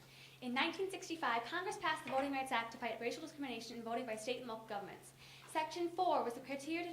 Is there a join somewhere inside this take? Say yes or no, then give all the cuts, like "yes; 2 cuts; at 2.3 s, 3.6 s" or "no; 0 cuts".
no; 0 cuts